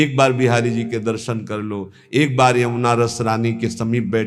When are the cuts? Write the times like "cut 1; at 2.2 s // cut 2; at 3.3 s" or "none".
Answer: none